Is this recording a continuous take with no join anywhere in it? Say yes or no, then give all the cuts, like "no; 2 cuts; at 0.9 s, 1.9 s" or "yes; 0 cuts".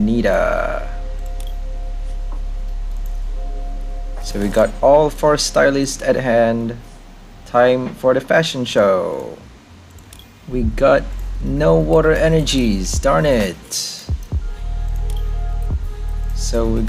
yes; 0 cuts